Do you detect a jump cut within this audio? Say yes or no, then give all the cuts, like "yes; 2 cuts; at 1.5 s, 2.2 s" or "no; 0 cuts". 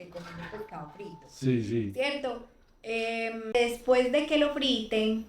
yes; 1 cut; at 3.5 s